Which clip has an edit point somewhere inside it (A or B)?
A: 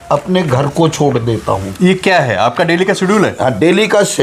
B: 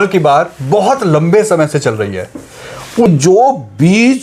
B